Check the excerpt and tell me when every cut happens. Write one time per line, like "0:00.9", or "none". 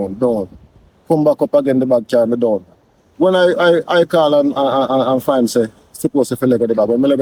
none